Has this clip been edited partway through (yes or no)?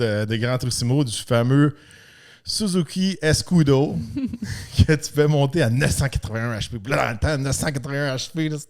no